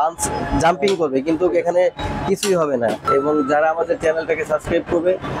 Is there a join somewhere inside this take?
yes; 1 cut; at 3.0 s

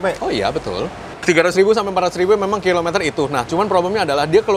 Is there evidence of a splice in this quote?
yes; 1 cut; at 1.2 s

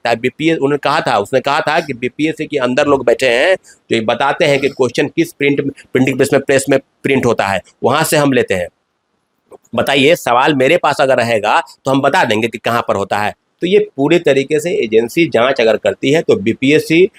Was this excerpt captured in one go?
yes; 0 cuts

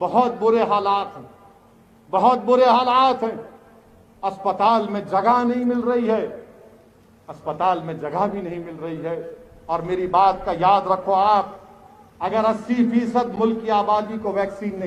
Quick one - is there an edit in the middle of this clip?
no; 0 cuts

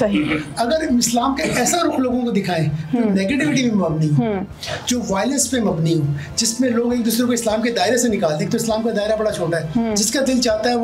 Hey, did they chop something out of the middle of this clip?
no; 0 cuts

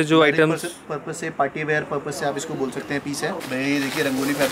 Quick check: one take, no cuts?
no; 1 cut; at 3.4 s

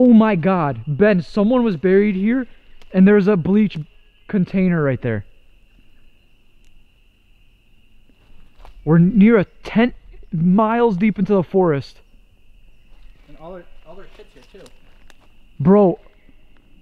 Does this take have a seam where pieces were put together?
no; 0 cuts

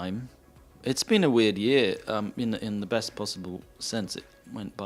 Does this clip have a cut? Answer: no; 0 cuts

